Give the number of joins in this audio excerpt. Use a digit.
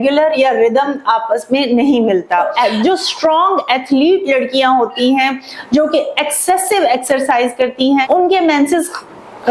2